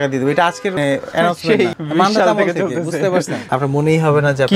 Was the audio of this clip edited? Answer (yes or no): yes